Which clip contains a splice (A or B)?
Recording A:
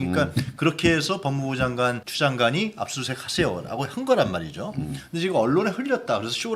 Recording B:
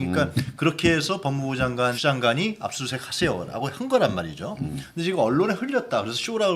B